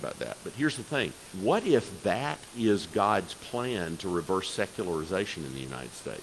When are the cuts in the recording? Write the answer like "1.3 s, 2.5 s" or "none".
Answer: 1.3 s